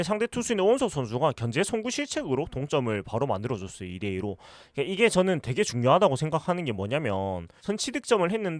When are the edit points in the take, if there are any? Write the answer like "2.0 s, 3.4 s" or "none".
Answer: 7.5 s